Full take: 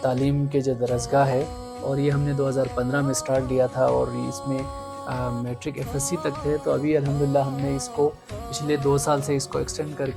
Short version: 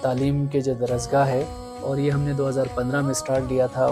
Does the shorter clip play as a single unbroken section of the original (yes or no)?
yes